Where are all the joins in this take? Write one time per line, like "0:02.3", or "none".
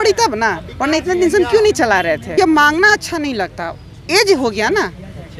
0:02.3